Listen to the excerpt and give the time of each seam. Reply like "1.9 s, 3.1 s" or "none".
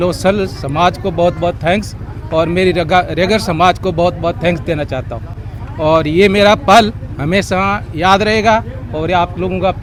none